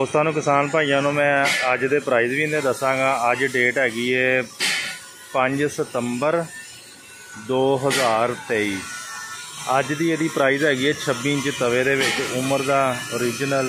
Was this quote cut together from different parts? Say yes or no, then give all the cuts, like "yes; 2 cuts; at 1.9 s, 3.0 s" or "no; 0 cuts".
no; 0 cuts